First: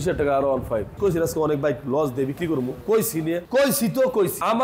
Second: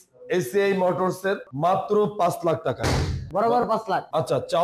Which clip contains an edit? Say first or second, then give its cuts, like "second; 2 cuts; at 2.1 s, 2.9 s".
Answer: second; 1 cut; at 1.5 s